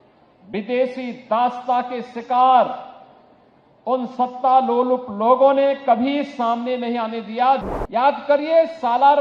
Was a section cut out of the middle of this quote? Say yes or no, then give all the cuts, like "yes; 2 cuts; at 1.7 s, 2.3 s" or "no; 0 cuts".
yes; 1 cut; at 7.6 s